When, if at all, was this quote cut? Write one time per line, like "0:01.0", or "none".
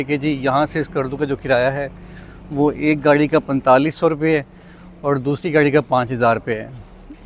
none